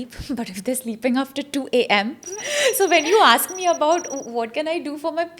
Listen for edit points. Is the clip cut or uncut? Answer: cut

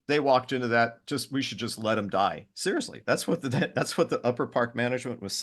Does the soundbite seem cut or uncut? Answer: uncut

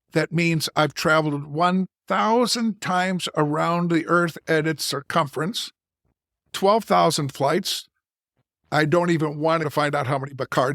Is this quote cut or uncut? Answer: cut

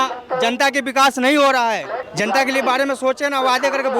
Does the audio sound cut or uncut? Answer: cut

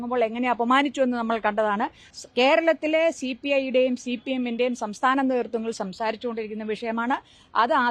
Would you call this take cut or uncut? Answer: cut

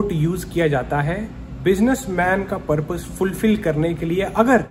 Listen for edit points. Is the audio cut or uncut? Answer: uncut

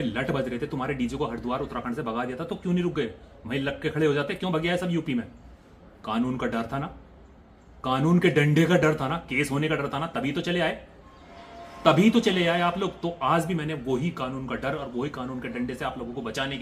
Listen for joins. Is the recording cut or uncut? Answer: uncut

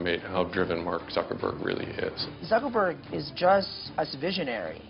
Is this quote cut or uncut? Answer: cut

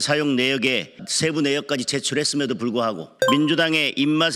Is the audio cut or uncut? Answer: cut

